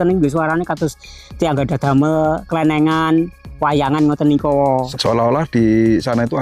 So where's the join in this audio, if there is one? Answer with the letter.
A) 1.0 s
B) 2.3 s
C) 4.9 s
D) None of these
C